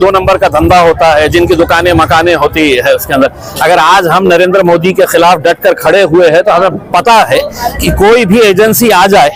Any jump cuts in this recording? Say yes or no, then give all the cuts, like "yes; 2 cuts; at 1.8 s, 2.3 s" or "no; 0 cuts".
no; 0 cuts